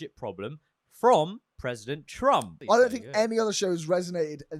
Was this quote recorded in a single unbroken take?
no; 1 cut; at 2.5 s

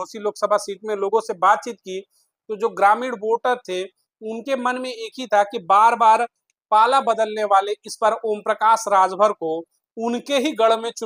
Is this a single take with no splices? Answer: yes; 0 cuts

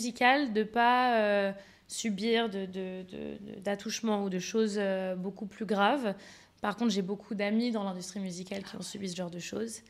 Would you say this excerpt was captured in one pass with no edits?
yes; 0 cuts

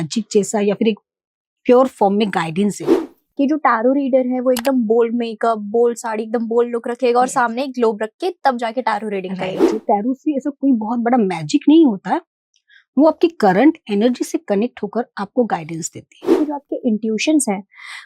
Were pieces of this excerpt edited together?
yes; 3 cuts; at 3.1 s, 9.8 s, 16.4 s

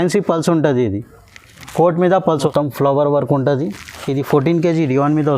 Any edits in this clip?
yes; 1 cut; at 2.5 s

